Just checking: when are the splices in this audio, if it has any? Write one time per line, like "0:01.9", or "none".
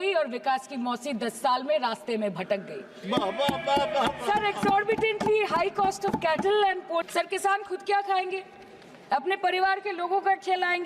0:07.1